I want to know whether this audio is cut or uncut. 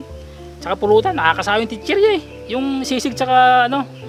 uncut